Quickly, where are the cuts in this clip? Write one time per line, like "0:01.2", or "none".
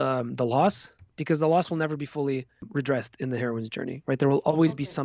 0:02.6

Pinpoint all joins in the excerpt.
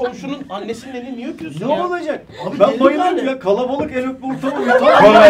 none

